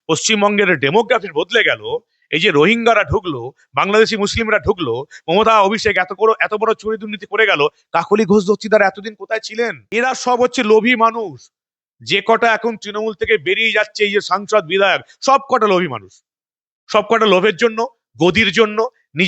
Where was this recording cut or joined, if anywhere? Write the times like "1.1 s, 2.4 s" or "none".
9.8 s